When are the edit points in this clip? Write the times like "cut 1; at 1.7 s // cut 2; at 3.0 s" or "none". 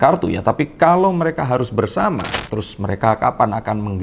cut 1; at 2.3 s